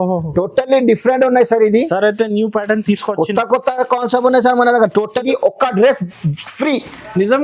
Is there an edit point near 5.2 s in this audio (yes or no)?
yes